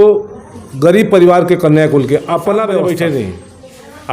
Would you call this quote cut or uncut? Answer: cut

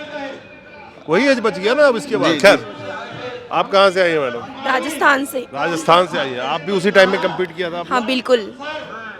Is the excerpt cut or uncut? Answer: uncut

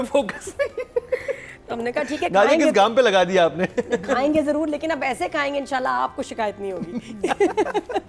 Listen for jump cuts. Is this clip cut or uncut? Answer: uncut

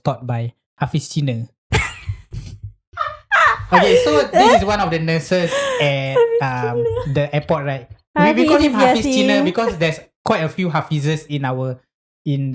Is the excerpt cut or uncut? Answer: uncut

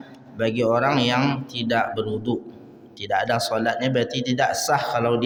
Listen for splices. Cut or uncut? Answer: uncut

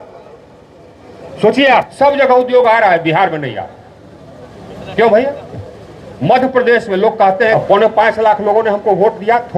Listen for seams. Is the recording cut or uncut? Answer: cut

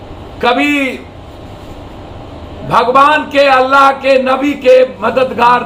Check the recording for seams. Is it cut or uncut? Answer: uncut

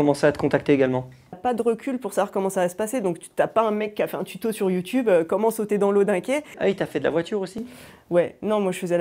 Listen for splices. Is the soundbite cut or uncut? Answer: cut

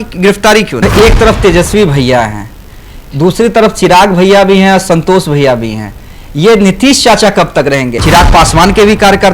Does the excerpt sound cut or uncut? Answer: cut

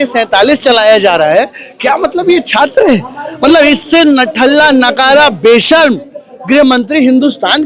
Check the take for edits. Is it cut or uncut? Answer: uncut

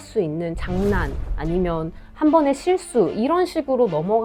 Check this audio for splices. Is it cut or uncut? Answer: uncut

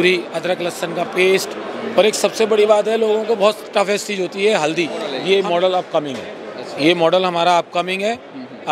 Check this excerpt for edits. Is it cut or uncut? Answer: cut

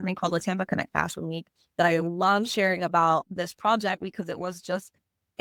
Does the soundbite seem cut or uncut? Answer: uncut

